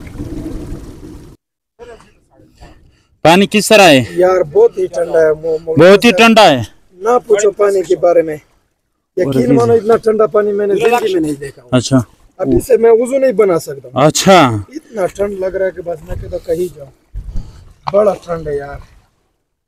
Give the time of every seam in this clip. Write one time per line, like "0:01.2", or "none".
none